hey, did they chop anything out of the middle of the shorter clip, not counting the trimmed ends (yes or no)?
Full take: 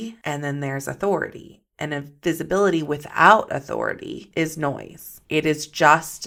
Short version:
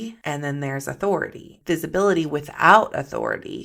yes